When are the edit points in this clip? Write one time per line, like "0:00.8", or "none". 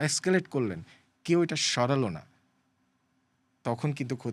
none